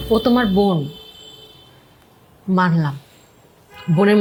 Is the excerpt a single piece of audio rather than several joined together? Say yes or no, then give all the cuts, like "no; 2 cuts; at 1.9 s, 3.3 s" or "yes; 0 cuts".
yes; 0 cuts